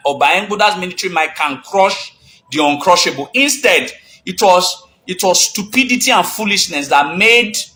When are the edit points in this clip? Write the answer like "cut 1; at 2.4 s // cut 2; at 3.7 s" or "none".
none